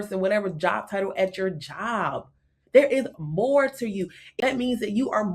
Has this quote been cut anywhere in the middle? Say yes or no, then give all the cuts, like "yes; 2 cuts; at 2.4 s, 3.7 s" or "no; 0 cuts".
yes; 1 cut; at 4.2 s